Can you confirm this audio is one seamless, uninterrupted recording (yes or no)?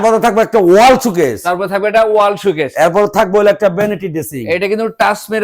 yes